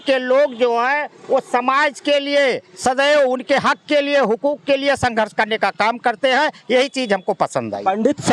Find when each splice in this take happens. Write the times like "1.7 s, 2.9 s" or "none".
none